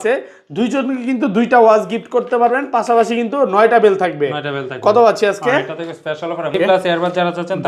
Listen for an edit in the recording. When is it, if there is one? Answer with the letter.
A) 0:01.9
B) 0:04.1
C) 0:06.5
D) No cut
C